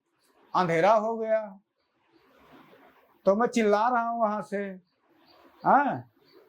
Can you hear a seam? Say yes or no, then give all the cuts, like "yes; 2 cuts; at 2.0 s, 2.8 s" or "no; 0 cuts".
no; 0 cuts